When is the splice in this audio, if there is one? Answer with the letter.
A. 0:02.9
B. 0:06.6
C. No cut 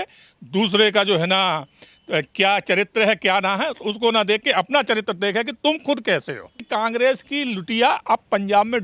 B